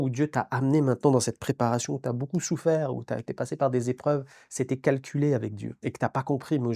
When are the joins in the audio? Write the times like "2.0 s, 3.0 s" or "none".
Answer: none